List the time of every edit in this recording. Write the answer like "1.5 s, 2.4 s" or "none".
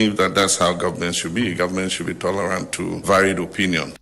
3.0 s